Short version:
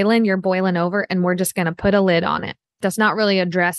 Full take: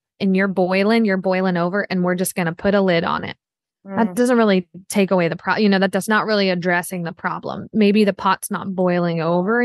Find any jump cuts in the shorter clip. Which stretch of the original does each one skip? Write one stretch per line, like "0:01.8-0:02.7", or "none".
0:03.7-0:06.0

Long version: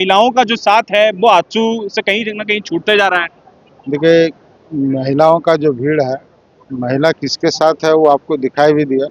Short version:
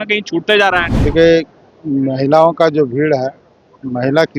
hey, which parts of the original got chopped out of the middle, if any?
0:03.3-0:03.8

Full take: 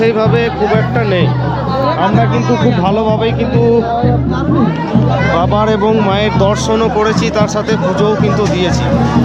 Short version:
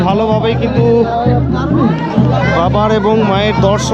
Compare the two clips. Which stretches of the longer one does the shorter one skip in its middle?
none

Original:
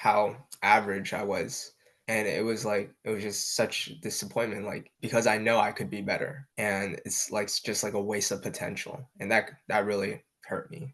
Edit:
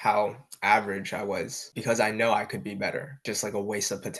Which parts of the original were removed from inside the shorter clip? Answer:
0:01.7-0:04.9
0:06.4-0:07.6

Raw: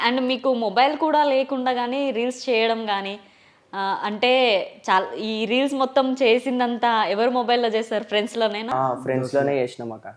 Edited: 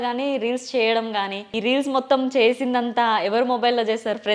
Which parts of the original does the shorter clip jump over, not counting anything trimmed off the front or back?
0:03.2-0:05.4

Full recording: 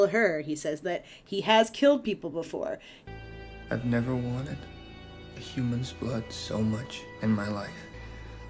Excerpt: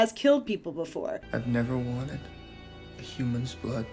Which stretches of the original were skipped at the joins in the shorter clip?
0:02.8-0:03.6

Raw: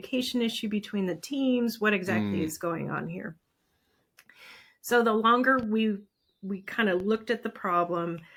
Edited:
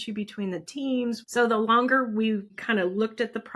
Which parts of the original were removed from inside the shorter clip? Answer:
0:01.8-0:04.8
0:06.1-0:06.7

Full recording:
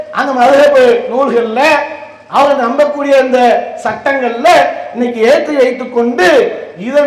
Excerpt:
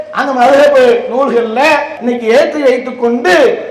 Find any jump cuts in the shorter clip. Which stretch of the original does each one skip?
0:01.9-0:04.9

